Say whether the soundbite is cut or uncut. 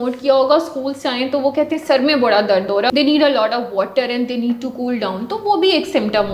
cut